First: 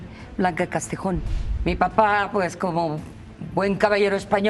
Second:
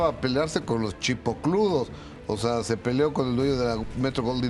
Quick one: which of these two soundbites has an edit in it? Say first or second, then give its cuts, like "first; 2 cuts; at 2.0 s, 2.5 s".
first; 1 cut; at 1.3 s